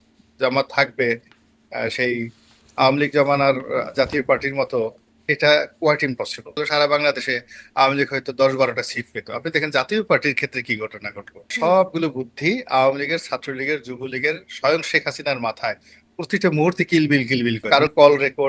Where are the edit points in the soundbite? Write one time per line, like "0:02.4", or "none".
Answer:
0:06.6
0:11.5
0:17.7